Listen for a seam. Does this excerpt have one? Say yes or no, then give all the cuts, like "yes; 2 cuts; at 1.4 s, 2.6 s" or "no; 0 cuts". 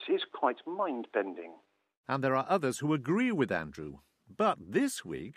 no; 0 cuts